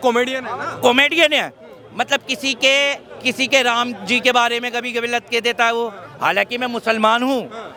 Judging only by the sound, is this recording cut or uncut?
uncut